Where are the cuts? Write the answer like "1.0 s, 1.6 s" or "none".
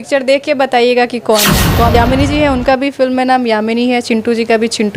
1.9 s